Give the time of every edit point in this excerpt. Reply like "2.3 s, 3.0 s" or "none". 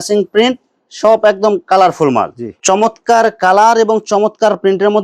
2.5 s